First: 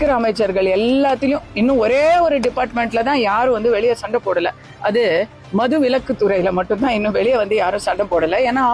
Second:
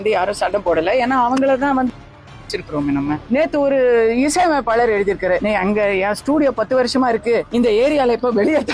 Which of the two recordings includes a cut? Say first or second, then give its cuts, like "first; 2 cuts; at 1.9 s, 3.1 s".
second; 3 cuts; at 3.2 s, 5.4 s, 7.5 s